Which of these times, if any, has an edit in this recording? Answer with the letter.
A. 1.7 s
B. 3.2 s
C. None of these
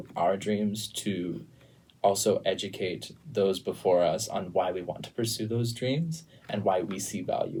C